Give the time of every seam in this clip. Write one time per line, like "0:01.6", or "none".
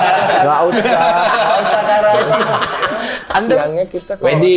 0:03.6